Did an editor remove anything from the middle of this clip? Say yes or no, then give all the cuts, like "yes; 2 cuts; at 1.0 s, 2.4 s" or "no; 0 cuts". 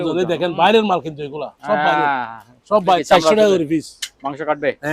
yes; 1 cut; at 3.0 s